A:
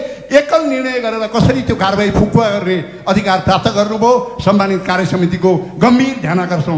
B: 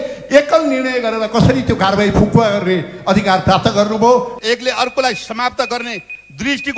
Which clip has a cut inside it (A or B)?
B